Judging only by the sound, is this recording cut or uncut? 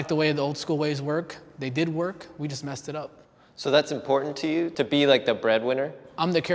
cut